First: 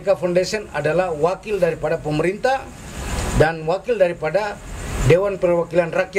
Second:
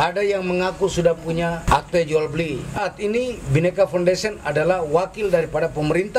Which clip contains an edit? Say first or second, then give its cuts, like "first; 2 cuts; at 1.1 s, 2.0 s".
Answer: second; 2 cuts; at 1.6 s, 2.8 s